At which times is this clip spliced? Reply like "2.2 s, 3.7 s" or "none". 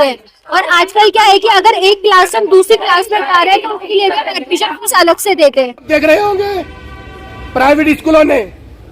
5.9 s